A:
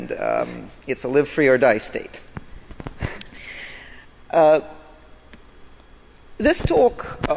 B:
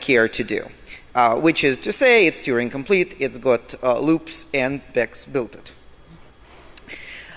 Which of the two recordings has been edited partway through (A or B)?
B